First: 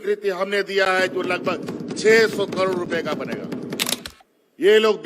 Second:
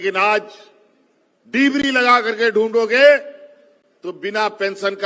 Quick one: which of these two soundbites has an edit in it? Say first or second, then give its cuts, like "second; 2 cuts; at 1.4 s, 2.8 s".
first; 1 cut; at 4.0 s